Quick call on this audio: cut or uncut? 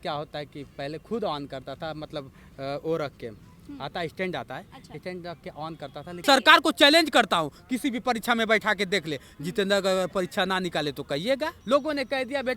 cut